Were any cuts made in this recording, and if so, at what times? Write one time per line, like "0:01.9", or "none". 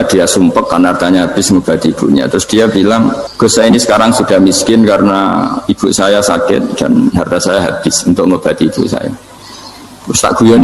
0:03.3